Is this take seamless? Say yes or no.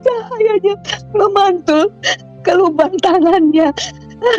yes